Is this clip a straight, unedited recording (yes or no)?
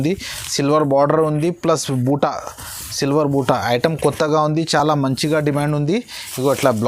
yes